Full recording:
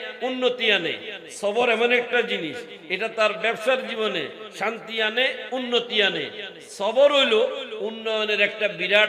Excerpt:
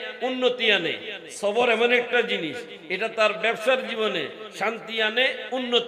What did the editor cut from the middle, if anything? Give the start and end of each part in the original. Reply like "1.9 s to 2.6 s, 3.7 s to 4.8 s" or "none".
none